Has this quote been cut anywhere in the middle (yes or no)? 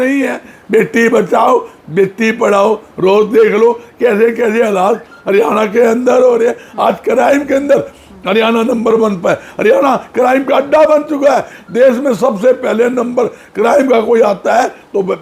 no